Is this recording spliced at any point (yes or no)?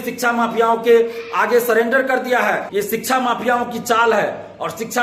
yes